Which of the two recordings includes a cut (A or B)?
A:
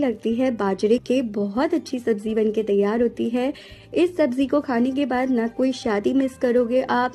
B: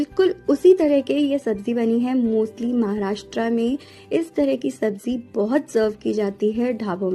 A